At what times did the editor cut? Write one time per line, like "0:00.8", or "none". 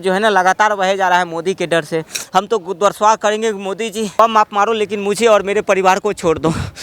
0:02.1
0:04.1